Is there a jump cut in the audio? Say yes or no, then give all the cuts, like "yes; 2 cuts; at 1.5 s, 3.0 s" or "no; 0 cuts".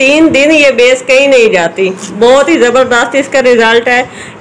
no; 0 cuts